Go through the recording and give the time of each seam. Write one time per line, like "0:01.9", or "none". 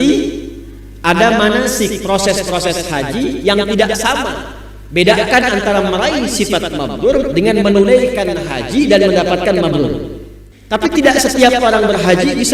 0:10.5